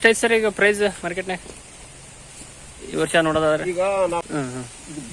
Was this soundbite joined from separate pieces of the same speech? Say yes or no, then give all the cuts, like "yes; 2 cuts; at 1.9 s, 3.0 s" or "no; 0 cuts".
yes; 1 cut; at 4.2 s